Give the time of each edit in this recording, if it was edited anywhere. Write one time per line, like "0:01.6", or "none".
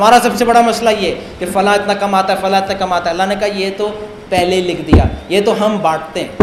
none